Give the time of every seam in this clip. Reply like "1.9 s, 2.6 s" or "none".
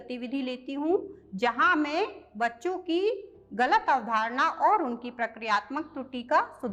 none